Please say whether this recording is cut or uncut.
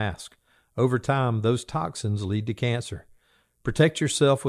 uncut